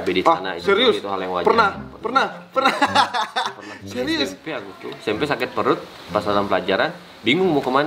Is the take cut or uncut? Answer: uncut